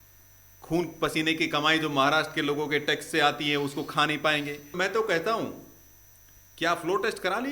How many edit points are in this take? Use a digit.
1